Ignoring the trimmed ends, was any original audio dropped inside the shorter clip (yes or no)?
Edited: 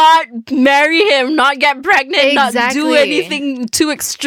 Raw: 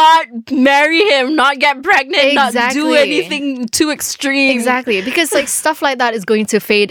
no